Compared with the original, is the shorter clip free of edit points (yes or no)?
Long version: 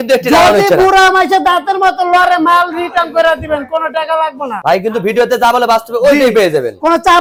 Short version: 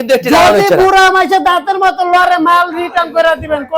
yes